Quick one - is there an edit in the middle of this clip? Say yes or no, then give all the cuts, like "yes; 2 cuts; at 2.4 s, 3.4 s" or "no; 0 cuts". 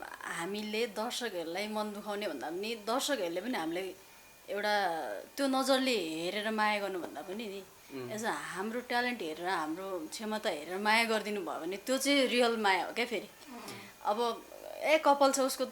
no; 0 cuts